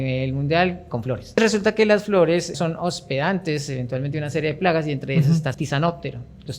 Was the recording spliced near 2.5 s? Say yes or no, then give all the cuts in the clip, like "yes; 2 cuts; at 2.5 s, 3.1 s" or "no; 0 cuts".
yes; 3 cuts; at 1.4 s, 2.5 s, 5.5 s